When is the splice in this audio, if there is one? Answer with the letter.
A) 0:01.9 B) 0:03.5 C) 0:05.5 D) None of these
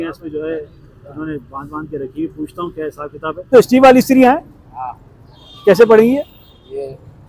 B